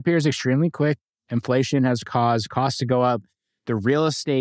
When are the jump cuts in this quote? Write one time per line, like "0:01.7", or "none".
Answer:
0:01.0